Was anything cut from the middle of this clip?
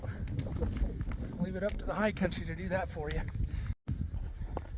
yes; 1 cut; at 3.6 s

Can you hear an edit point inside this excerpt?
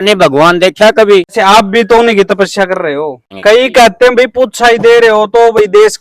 yes; 2 cuts; at 1.3 s, 3.3 s

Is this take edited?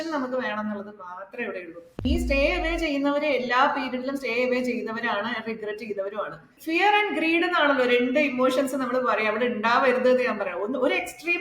yes; 2 cuts; at 2.1 s, 6.6 s

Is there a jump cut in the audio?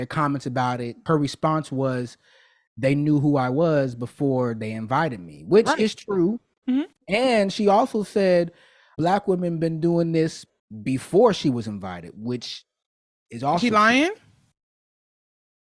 no; 0 cuts

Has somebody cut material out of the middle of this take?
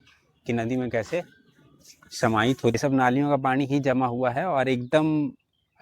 yes; 1 cut; at 2.8 s

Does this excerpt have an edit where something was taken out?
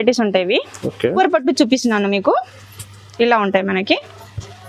yes; 1 cut; at 1.1 s

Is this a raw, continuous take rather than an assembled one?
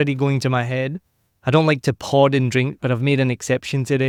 yes; 0 cuts

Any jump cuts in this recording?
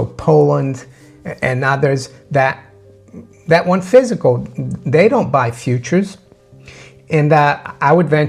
no; 0 cuts

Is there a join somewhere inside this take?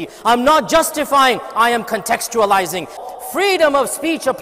yes; 1 cut; at 3.0 s

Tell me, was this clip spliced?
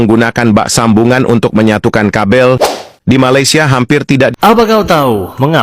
yes; 1 cut; at 4.3 s

